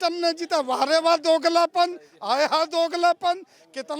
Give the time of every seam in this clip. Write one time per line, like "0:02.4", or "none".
none